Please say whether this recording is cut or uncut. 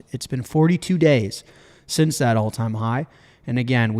uncut